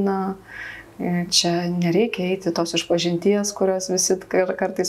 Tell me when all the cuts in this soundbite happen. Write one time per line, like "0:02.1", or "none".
none